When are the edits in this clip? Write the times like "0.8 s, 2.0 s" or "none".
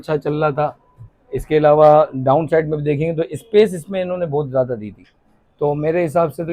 none